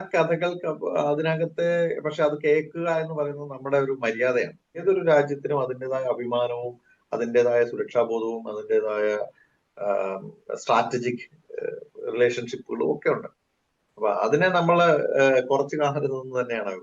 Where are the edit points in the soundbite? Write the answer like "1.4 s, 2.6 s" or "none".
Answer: 4.8 s